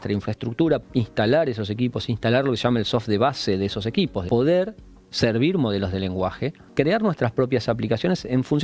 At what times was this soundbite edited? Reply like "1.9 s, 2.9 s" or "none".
0.8 s, 4.3 s, 6.6 s